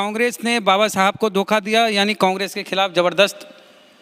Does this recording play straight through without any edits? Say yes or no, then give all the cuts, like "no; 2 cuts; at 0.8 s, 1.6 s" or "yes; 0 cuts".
yes; 0 cuts